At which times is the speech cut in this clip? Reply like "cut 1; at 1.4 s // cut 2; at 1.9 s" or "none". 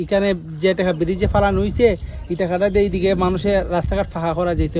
none